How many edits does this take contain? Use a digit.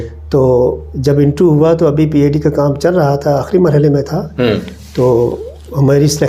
0